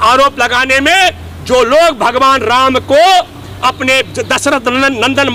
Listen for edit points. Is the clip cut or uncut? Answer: uncut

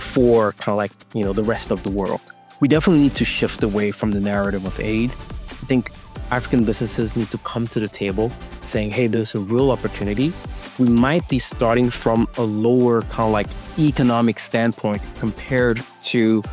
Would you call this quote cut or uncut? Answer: cut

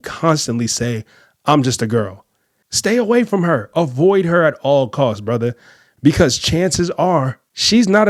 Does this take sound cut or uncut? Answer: uncut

